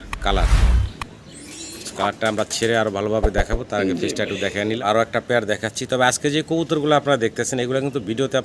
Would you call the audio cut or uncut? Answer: cut